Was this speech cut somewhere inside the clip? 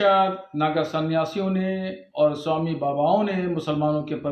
no; 0 cuts

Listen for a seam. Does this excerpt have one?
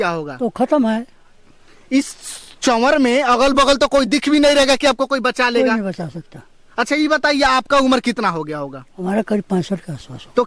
no; 0 cuts

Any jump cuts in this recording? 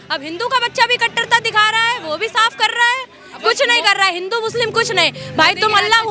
no; 0 cuts

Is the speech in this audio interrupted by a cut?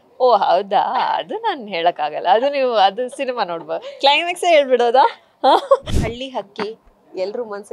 yes; 1 cut; at 5.9 s

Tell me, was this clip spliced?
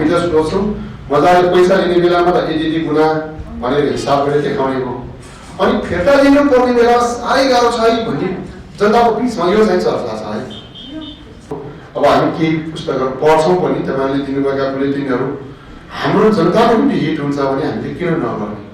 yes; 1 cut; at 11.5 s

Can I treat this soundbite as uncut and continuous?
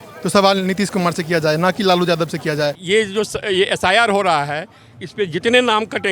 no; 1 cut; at 2.8 s

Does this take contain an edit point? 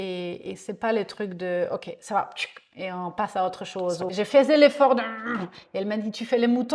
yes; 1 cut; at 4.1 s

